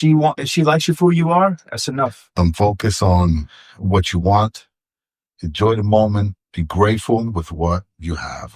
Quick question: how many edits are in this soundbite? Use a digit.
1